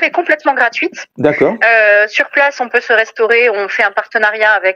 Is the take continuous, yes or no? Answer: yes